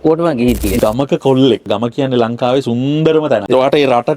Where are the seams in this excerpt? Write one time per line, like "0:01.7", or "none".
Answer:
0:00.8
0:01.7